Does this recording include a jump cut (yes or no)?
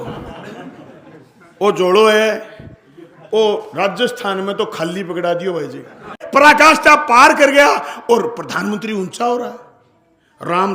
yes